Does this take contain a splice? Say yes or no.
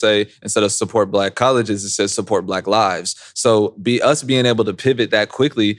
no